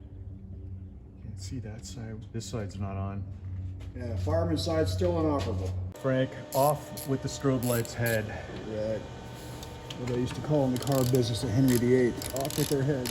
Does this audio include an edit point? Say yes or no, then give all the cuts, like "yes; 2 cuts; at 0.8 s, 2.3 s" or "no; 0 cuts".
yes; 1 cut; at 5.7 s